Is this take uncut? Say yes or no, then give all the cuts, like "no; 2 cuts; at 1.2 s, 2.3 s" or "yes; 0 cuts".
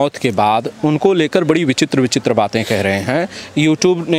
yes; 0 cuts